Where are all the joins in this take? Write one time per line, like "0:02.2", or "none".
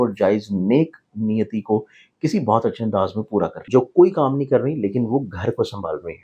0:03.6